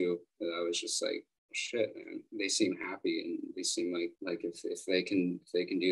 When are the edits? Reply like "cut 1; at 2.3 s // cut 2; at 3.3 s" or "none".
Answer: none

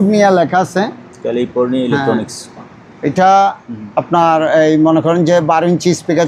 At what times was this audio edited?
none

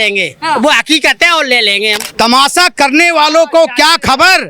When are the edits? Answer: cut 1; at 2.0 s

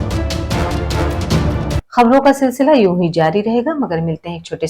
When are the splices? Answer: cut 1; at 1.8 s

